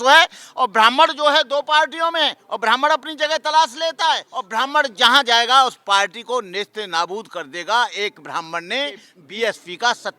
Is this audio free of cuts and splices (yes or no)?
no